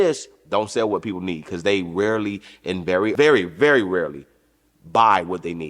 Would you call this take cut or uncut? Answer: cut